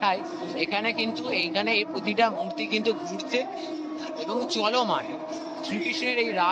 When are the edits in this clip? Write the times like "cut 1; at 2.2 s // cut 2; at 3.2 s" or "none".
none